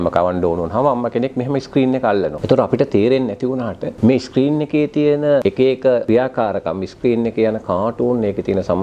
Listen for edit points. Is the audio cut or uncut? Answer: cut